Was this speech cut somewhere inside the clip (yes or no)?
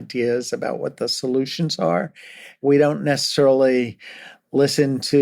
yes